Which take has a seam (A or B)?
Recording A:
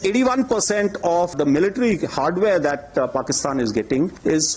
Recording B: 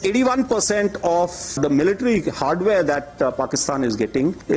A